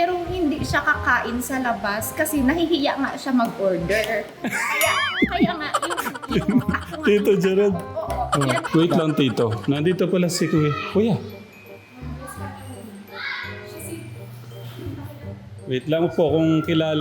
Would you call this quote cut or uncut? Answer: cut